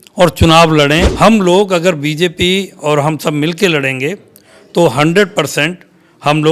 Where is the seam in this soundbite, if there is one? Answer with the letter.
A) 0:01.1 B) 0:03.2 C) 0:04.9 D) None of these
A